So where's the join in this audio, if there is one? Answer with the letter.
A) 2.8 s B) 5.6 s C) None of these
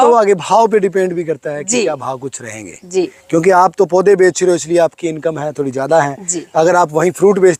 C